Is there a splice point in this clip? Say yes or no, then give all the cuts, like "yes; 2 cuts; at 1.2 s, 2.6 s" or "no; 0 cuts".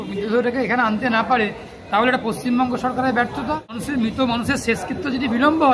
yes; 1 cut; at 3.8 s